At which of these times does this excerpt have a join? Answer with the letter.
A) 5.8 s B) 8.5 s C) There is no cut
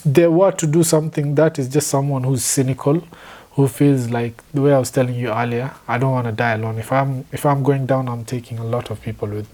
C